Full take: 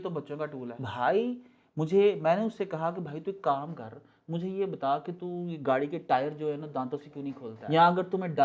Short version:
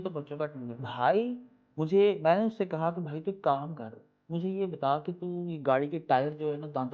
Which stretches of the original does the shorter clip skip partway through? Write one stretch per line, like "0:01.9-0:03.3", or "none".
none